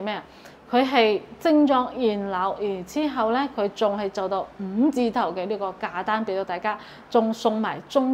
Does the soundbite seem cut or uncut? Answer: uncut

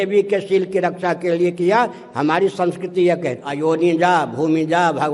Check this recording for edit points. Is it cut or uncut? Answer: cut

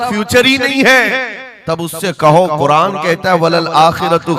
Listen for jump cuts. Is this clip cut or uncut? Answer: uncut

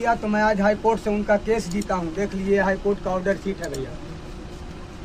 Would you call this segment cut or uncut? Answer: uncut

